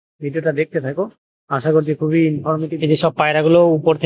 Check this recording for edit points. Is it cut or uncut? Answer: cut